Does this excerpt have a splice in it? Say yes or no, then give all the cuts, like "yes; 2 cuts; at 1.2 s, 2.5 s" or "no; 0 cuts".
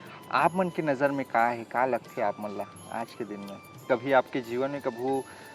yes; 1 cut; at 3.8 s